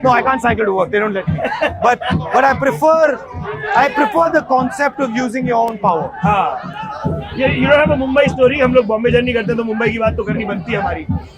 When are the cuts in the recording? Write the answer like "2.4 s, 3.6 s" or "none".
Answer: none